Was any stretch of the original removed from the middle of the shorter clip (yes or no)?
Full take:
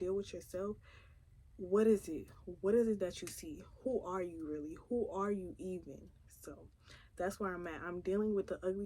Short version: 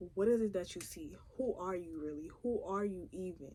no